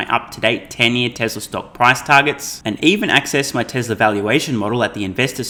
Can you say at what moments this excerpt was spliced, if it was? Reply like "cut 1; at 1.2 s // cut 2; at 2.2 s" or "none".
none